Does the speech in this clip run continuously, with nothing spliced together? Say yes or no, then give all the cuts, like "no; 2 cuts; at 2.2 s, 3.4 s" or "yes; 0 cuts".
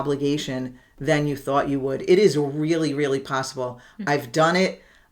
yes; 0 cuts